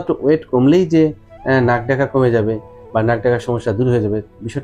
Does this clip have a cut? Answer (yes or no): no